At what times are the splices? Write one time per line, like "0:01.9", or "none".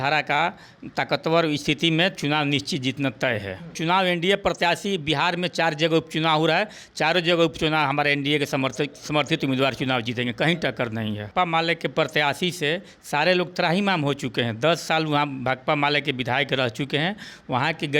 0:03.8
0:11.3

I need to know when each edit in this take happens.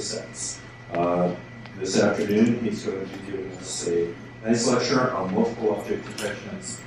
0:02.9

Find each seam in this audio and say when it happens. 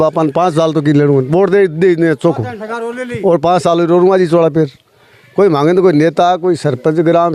none

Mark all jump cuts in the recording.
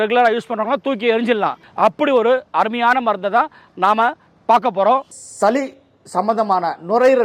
0:01.6
0:05.2

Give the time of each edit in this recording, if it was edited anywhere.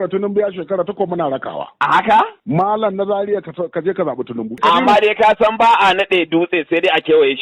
0:02.4
0:04.5

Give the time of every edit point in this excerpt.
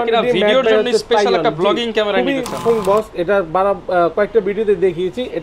0:02.6

